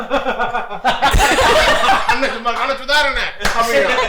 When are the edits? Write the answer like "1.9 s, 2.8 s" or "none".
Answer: none